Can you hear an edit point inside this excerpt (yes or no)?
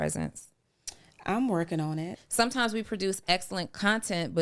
yes